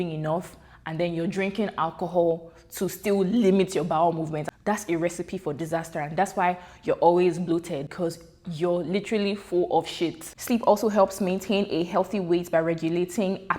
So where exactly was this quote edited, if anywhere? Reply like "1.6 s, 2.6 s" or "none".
4.4 s, 7.9 s, 10.3 s